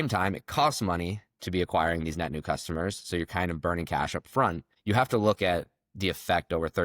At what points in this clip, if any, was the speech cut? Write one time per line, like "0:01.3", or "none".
0:04.7